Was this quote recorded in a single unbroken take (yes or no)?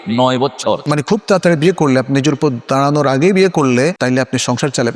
no